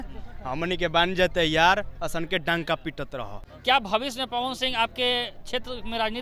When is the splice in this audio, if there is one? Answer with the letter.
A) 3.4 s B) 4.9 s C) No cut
A